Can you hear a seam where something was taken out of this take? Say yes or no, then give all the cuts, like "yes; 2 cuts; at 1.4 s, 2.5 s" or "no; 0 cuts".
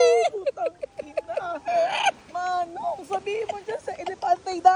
no; 0 cuts